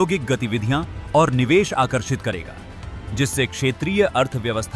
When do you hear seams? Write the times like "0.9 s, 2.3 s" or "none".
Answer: none